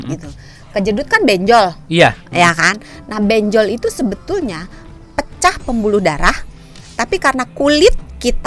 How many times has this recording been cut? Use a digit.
0